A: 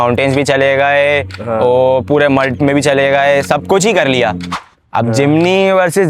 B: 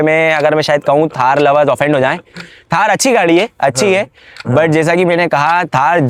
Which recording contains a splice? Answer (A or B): A